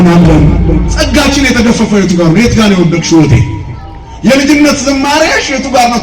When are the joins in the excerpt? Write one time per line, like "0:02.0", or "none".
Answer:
0:00.9